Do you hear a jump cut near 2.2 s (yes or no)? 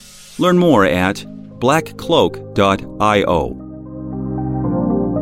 no